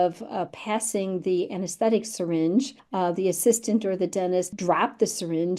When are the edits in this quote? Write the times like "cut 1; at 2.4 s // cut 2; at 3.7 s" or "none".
cut 1; at 2.8 s // cut 2; at 4.5 s